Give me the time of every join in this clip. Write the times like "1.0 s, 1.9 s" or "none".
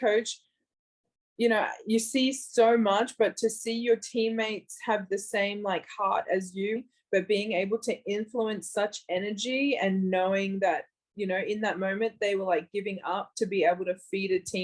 6.8 s